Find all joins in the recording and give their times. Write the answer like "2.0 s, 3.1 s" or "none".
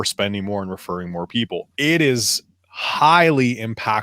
1.7 s